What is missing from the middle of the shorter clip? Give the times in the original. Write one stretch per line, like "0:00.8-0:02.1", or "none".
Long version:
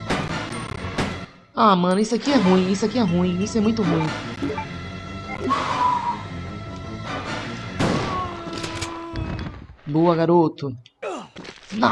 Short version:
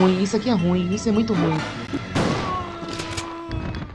0:04.5-0:07.6